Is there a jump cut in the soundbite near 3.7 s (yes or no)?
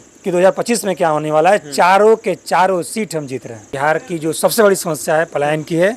yes